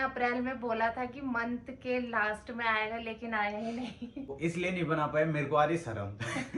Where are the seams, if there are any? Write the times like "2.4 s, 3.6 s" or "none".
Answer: 4.3 s